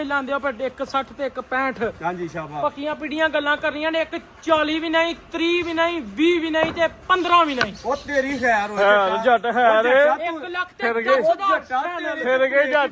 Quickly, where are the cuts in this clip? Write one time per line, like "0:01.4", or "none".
none